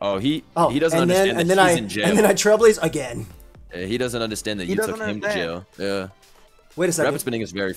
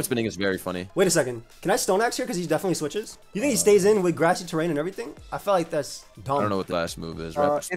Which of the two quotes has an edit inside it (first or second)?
second